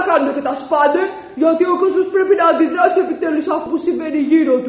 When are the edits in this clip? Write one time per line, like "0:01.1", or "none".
0:03.7